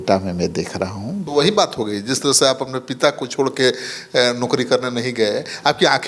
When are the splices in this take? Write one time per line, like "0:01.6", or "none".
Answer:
0:01.2